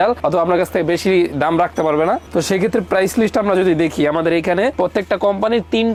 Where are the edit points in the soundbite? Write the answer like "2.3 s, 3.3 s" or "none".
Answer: none